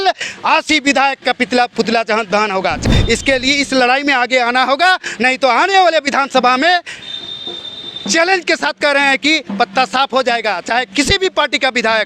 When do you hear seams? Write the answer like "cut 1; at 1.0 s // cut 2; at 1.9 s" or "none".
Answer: cut 1; at 2.8 s